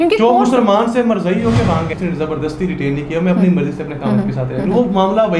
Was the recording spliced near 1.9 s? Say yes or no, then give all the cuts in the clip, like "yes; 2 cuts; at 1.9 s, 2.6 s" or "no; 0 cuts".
yes; 1 cut; at 1.9 s